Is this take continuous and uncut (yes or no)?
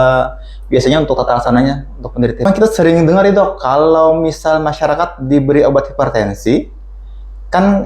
no